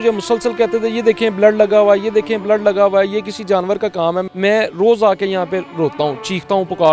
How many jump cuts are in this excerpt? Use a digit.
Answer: 1